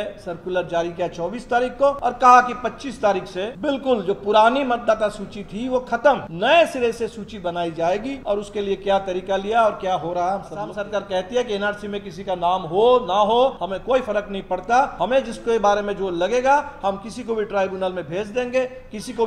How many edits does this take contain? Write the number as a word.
seven